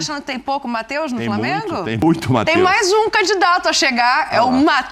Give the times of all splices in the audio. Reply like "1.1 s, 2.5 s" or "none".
none

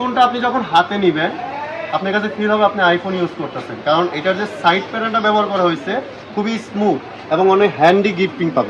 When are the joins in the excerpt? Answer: none

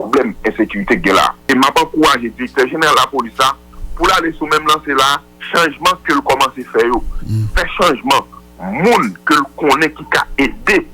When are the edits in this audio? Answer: 1.4 s

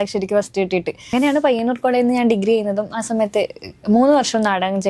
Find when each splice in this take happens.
1.1 s

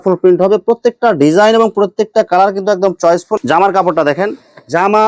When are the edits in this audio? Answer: 3.3 s

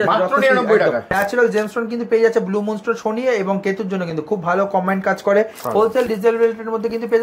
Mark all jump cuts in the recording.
1.1 s, 5.6 s

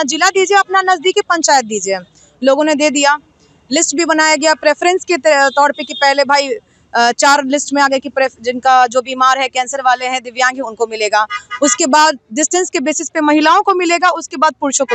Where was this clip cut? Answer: none

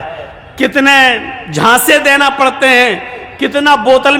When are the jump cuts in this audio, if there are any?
none

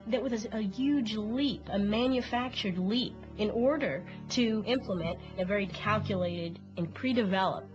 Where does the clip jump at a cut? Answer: 4.1 s

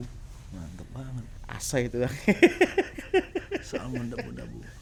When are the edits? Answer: none

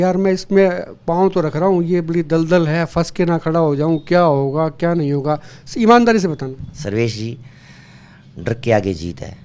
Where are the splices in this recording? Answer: none

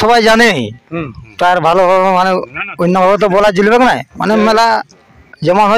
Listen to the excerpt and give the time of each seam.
none

